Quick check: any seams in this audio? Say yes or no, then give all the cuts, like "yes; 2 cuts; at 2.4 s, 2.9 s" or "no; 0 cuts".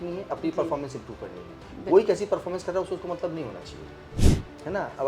yes; 1 cut; at 4.2 s